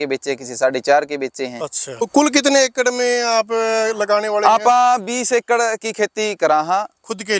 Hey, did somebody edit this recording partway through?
yes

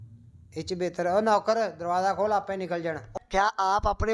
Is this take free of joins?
no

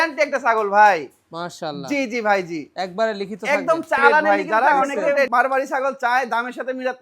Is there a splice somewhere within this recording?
yes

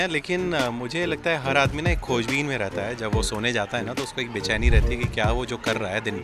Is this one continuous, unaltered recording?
yes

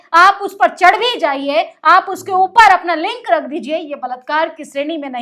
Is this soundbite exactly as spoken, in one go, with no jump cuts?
yes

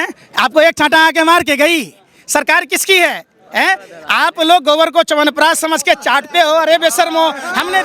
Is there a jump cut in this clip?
no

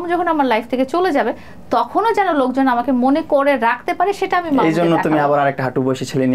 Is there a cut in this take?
no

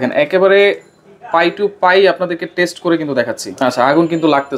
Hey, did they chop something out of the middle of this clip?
yes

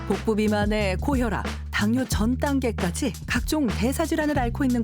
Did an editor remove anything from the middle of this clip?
yes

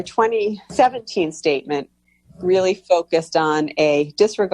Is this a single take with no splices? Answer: yes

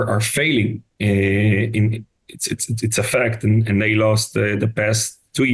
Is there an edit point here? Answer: no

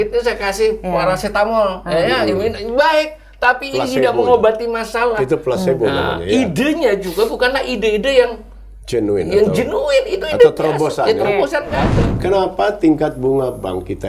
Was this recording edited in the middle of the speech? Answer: yes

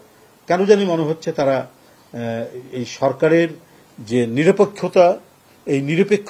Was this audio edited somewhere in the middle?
no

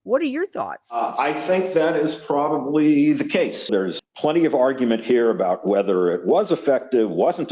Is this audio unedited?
no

